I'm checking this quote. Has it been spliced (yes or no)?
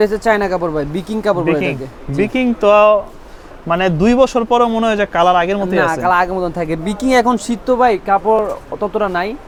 no